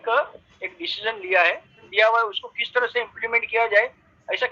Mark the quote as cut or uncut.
cut